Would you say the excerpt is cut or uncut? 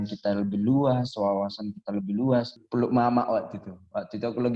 cut